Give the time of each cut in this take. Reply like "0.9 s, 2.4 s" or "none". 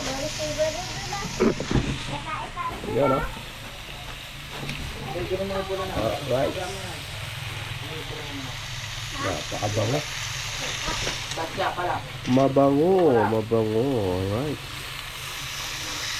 none